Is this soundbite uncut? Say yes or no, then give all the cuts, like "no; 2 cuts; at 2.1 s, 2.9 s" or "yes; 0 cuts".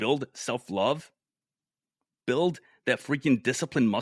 yes; 0 cuts